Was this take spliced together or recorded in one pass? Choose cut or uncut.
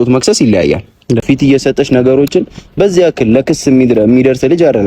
cut